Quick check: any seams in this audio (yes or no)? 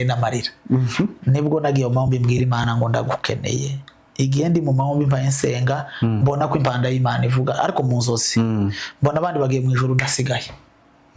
no